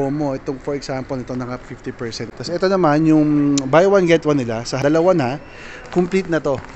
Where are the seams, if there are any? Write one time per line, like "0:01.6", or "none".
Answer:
0:02.3
0:04.8

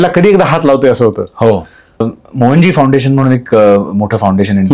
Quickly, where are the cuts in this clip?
0:02.2

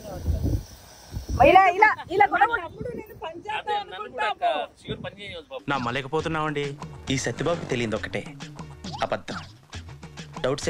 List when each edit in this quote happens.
none

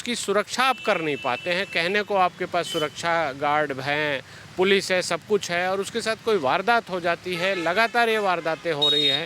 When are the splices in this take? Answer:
none

